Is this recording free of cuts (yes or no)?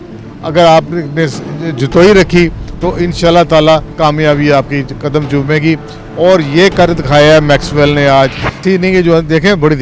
no